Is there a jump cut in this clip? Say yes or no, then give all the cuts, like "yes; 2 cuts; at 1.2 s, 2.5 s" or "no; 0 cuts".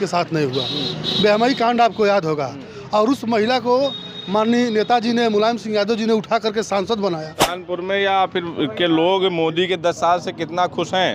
yes; 1 cut; at 7.6 s